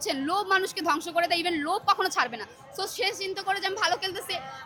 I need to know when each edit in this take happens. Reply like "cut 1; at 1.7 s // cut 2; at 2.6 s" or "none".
none